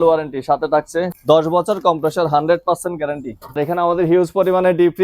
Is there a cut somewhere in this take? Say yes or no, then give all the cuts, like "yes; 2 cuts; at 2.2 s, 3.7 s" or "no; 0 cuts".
yes; 2 cuts; at 1.1 s, 3.6 s